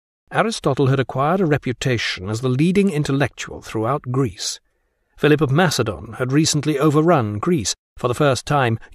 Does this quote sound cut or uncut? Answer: uncut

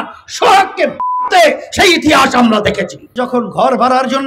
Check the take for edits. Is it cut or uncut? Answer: cut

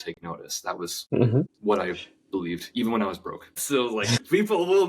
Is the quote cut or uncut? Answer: cut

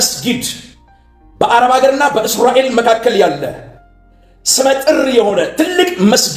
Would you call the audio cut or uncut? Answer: uncut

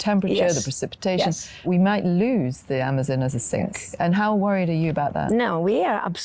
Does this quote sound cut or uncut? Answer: cut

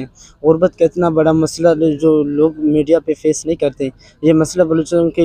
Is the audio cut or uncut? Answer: uncut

